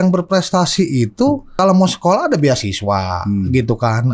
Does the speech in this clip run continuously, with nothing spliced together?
no; 1 cut; at 1.6 s

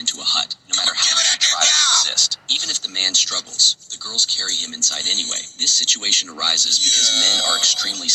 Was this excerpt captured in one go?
yes; 0 cuts

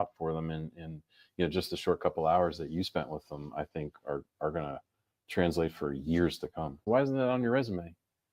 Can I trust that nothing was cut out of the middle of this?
no; 1 cut; at 6.8 s

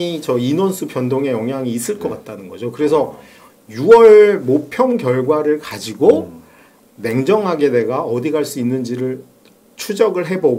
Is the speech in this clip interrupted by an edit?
no; 0 cuts

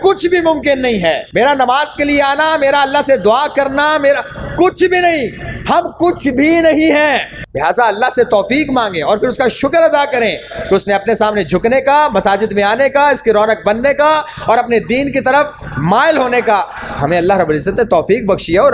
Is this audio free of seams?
no; 2 cuts; at 1.2 s, 7.4 s

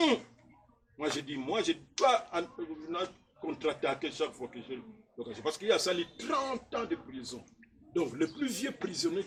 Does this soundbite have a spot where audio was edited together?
no; 0 cuts

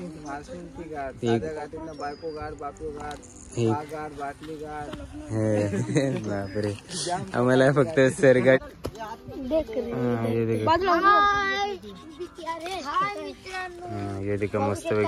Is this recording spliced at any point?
yes; 1 cut; at 8.8 s

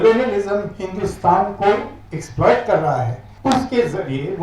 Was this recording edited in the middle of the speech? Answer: yes; 1 cut; at 3.3 s

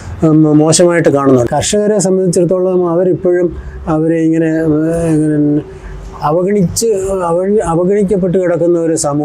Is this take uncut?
no; 1 cut; at 1.5 s

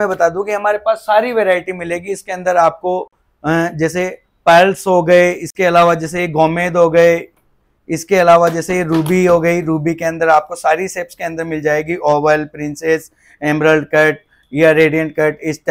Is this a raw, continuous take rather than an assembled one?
yes; 0 cuts

